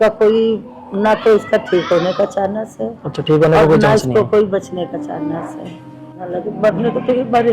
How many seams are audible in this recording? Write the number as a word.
one